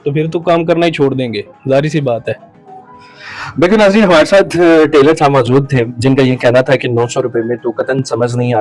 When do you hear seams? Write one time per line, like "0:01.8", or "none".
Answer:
none